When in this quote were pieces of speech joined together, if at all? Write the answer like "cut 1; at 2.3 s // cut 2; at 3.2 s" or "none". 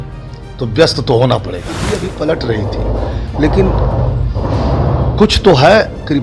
cut 1; at 1.8 s